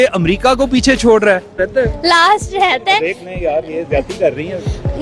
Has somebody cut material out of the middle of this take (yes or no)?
yes